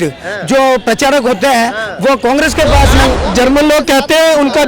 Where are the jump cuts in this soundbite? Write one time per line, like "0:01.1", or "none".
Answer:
0:03.1

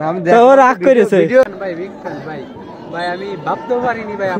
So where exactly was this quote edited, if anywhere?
0:01.5

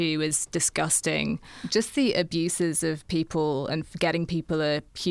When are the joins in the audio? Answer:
0:01.6

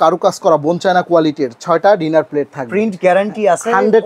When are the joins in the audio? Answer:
none

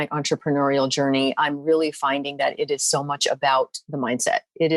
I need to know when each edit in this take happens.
0:03.8

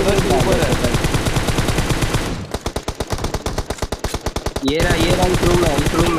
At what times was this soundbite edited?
none

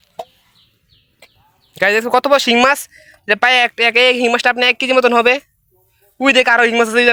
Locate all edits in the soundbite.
none

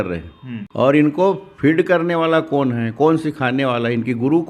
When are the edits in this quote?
none

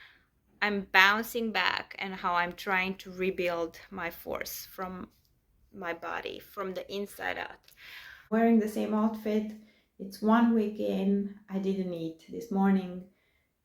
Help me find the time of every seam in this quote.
0:08.3

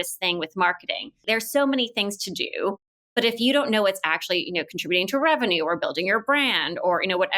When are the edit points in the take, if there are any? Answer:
0:01.2

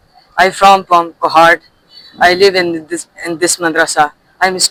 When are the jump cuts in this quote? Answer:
none

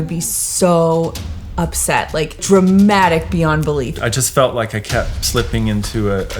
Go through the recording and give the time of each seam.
0:02.4
0:03.9

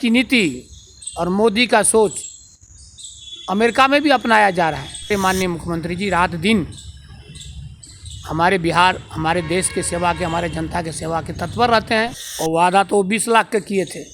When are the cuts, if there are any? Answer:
0:05.1
0:12.2

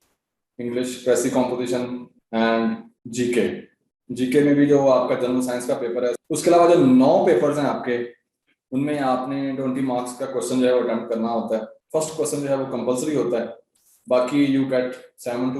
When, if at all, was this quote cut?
0:06.2
0:11.8

